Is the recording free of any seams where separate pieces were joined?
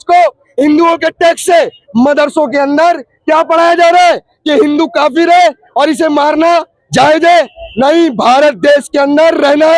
yes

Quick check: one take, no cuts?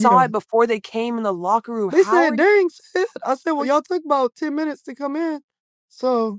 no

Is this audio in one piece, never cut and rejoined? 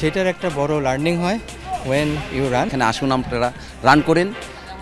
no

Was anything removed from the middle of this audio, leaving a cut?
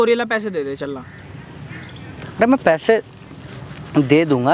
no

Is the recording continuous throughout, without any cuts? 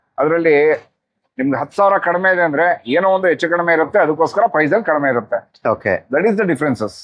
yes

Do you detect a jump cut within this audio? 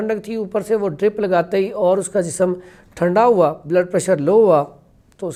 no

